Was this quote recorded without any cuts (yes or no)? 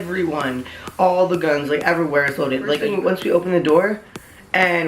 no